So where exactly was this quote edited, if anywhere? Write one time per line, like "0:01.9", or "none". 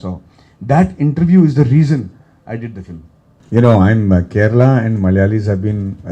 0:03.3